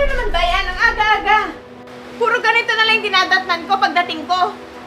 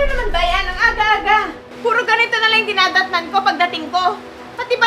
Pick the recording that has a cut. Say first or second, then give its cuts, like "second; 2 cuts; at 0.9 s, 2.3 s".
second; 1 cut; at 1.6 s